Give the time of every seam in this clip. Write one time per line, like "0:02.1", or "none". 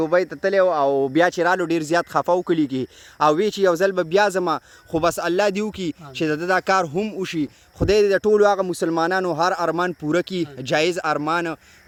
none